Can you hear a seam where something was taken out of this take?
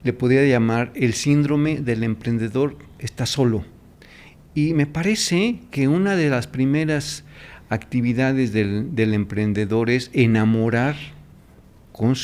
no; 0 cuts

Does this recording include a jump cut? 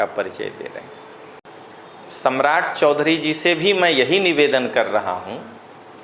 yes; 1 cut; at 1.4 s

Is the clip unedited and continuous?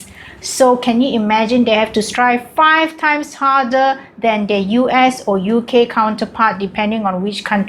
yes; 0 cuts

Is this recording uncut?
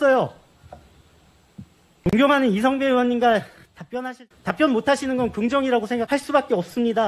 no; 2 cuts; at 3.9 s, 6.1 s

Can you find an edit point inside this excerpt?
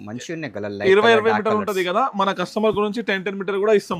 no; 0 cuts

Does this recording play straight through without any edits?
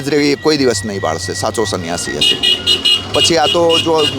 yes; 0 cuts

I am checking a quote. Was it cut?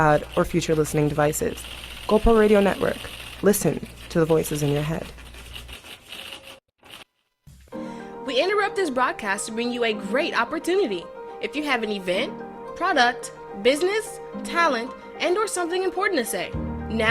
yes; 1 cut; at 7.2 s

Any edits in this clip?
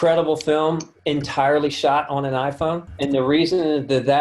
yes; 2 cuts; at 0.9 s, 2.9 s

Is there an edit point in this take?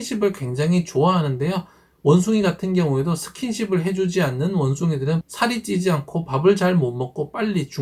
no; 0 cuts

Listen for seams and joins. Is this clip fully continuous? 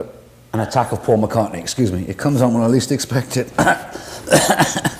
no; 1 cut; at 3.9 s

